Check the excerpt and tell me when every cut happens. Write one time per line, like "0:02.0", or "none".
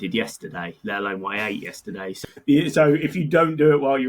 0:02.2